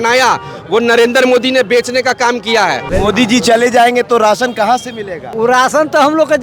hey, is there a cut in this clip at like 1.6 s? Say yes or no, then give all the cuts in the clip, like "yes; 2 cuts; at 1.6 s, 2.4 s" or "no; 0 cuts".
no; 2 cuts; at 2.9 s, 5.3 s